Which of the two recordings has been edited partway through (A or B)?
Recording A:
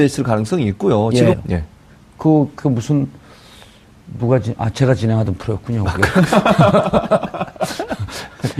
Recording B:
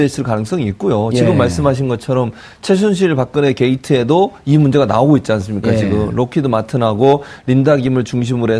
B